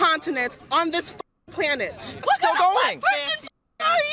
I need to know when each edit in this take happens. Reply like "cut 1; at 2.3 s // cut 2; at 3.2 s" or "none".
cut 1; at 2.2 s

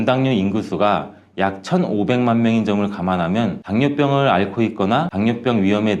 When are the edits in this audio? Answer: none

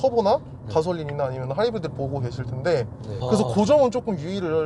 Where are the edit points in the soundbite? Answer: cut 1; at 3.2 s

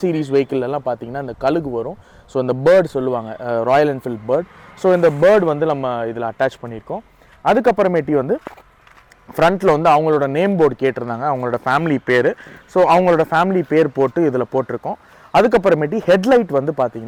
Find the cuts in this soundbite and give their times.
none

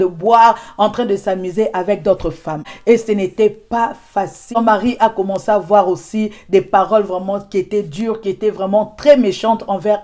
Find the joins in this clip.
none

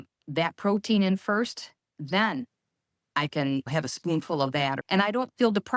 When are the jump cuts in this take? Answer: cut 1; at 1.9 s // cut 2; at 3.7 s // cut 3; at 4.8 s

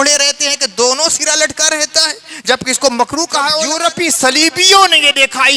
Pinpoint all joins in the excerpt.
cut 1; at 3.7 s

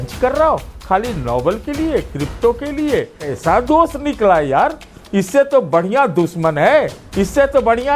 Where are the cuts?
cut 1; at 3.3 s

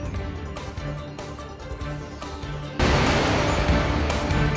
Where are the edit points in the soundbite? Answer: none

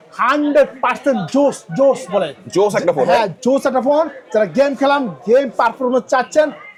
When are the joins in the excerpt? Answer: none

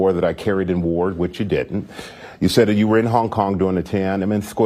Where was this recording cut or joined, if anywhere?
none

